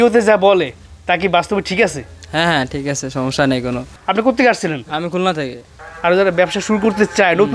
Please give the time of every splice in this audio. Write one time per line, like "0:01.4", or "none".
0:03.9